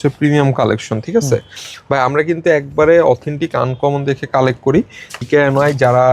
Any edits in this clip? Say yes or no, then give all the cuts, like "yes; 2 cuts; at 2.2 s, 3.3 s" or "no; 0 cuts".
yes; 1 cut; at 5.2 s